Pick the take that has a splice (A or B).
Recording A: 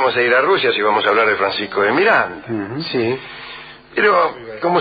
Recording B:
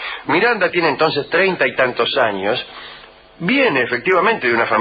B